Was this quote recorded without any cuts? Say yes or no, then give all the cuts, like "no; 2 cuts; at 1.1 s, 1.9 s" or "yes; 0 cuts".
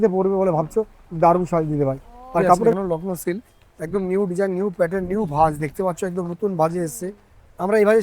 no; 1 cut; at 2.7 s